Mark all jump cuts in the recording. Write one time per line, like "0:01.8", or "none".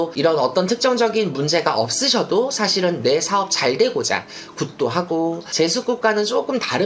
0:05.4